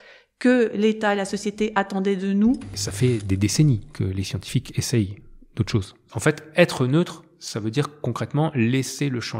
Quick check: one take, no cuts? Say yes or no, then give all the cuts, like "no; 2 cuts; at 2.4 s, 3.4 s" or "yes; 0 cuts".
no; 2 cuts; at 2.7 s, 6.0 s